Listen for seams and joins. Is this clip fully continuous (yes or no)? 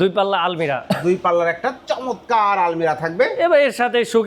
yes